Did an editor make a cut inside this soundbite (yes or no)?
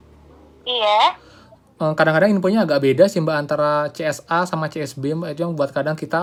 no